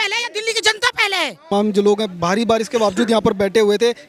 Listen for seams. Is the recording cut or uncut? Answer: uncut